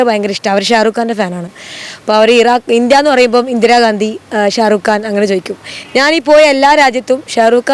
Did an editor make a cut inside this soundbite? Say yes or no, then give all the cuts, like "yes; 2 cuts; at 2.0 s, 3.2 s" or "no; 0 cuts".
no; 0 cuts